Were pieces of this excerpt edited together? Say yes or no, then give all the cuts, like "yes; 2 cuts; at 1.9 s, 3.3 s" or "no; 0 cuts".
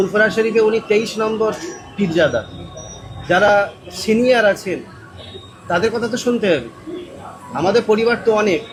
no; 0 cuts